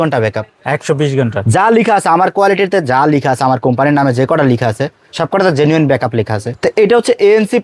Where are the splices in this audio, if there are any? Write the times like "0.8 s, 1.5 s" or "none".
6.5 s